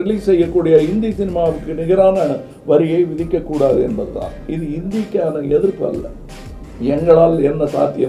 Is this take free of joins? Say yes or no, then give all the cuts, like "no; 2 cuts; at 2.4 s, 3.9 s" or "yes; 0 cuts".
yes; 0 cuts